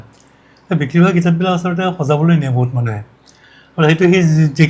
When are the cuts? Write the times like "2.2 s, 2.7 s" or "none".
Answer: none